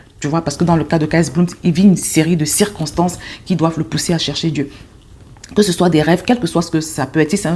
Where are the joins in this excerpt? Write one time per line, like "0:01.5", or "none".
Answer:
none

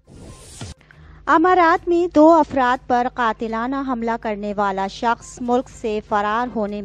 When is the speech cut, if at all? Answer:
0:01.1

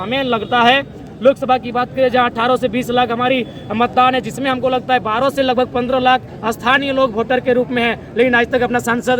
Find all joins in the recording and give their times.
none

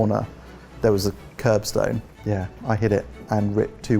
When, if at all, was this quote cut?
0:02.1

